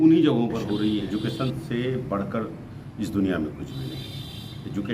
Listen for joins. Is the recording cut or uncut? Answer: cut